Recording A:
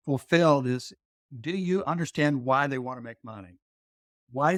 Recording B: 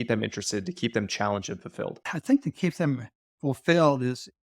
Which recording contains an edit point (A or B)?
B